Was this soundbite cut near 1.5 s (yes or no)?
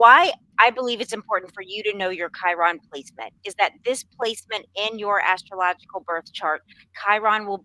no